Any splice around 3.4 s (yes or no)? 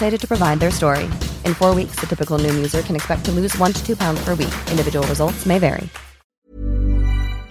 no